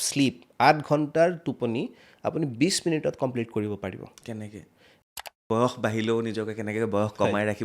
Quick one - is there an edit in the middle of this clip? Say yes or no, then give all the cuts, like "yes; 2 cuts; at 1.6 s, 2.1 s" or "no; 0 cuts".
yes; 1 cut; at 5.0 s